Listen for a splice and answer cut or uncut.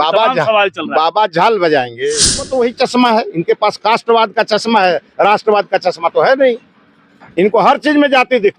cut